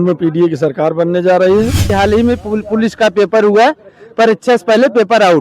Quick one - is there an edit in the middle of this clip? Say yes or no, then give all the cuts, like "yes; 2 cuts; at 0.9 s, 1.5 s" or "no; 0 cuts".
yes; 1 cut; at 1.9 s